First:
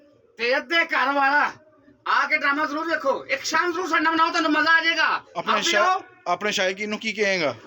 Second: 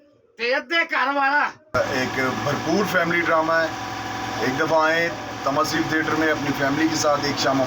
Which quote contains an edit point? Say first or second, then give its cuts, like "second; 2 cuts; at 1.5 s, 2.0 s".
second; 1 cut; at 1.8 s